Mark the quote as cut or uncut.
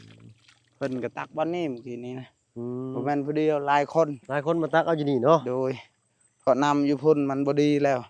uncut